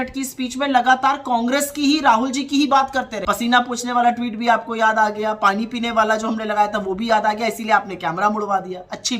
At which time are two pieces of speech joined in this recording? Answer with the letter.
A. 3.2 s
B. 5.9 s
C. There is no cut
A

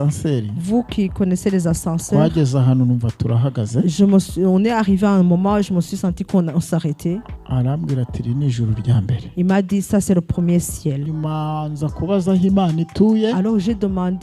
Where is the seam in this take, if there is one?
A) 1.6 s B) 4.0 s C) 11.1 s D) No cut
C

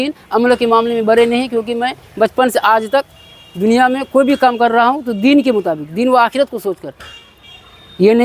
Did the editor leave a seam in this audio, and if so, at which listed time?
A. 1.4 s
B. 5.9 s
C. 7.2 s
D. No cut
D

